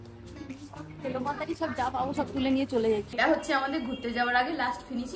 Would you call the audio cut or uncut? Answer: cut